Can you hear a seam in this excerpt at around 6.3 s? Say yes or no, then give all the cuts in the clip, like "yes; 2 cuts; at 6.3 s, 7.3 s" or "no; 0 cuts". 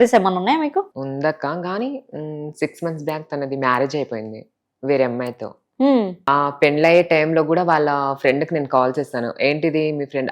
yes; 2 cuts; at 0.9 s, 6.3 s